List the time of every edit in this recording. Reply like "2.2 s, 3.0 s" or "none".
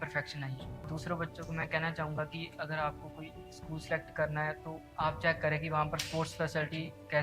0.9 s